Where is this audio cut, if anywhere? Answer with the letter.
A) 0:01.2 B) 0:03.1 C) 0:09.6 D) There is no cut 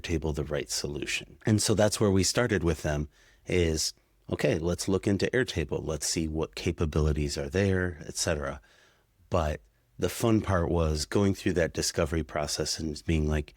A